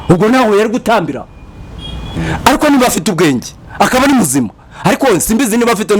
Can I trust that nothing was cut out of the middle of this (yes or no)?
no